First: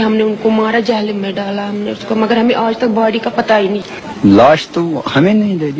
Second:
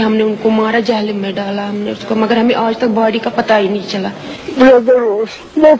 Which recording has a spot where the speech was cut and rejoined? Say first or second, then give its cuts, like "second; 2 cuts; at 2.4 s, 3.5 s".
first; 1 cut; at 3.9 s